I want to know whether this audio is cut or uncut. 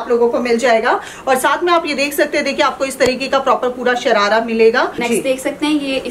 cut